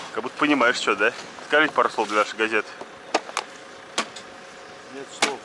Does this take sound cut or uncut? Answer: cut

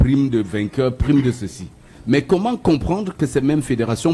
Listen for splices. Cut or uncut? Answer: uncut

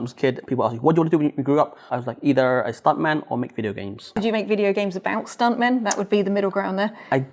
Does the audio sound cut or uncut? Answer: cut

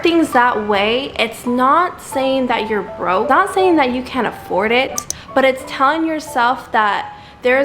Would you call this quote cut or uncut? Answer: cut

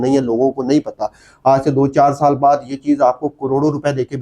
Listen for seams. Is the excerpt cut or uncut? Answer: uncut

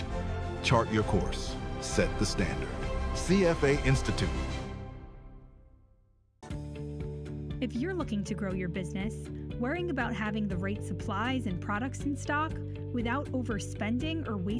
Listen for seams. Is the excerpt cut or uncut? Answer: cut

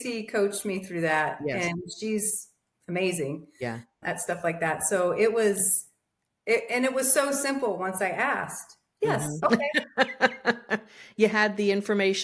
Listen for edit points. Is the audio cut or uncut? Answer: uncut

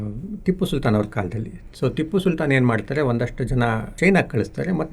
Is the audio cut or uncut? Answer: cut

